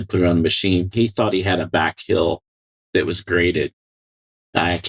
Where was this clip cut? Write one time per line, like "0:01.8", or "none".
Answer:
0:00.9